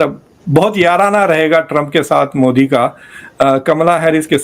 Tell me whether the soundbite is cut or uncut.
uncut